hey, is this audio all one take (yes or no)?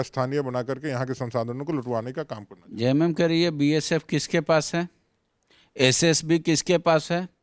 yes